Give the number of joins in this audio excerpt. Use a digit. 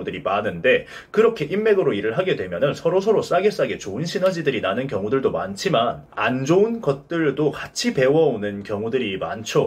0